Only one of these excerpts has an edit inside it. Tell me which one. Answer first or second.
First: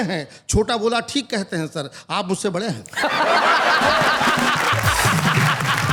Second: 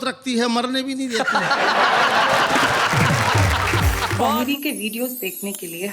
second